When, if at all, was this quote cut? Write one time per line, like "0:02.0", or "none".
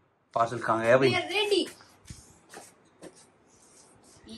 none

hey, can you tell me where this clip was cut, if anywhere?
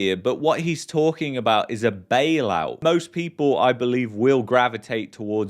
0:02.8

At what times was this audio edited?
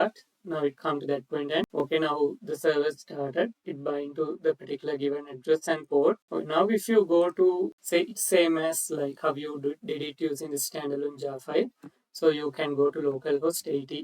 0:01.8
0:06.3
0:07.8

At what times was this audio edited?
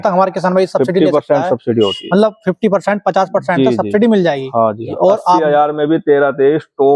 0:04.9

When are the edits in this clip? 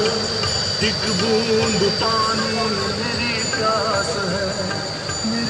none

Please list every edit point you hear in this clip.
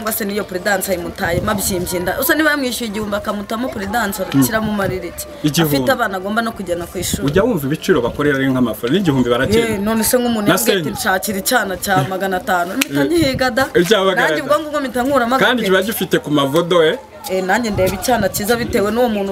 none

